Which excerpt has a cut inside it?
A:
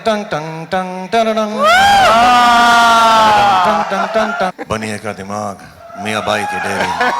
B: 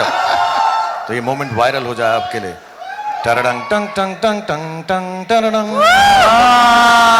A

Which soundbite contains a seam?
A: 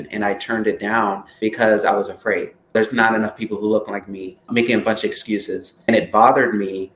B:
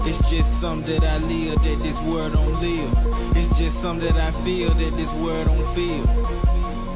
A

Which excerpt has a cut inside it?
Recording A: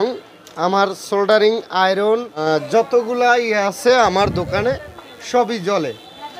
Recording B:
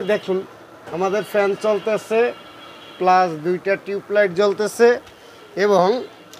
A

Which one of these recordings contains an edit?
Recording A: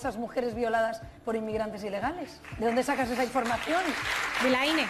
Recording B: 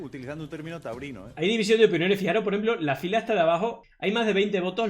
B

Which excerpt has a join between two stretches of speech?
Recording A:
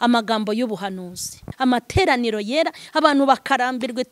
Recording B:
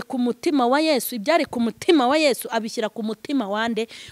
A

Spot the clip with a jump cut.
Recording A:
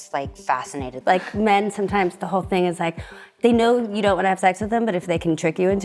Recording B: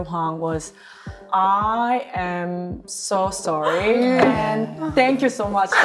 A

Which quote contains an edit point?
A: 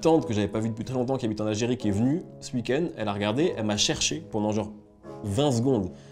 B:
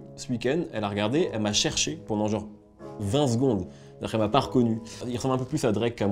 B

